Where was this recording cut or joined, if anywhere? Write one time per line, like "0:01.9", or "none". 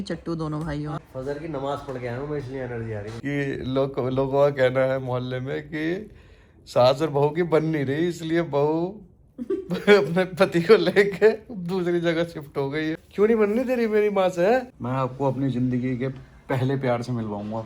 0:01.0
0:03.1
0:13.0
0:14.7